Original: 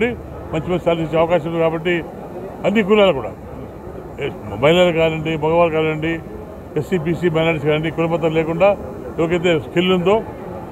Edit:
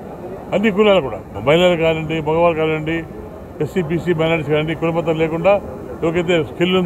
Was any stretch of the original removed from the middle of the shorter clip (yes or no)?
yes